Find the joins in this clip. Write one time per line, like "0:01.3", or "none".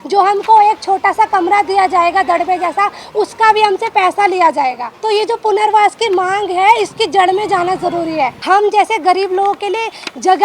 0:04.9
0:08.4